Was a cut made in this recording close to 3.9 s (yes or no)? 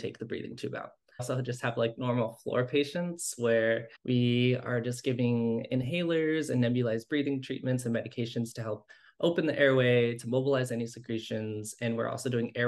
yes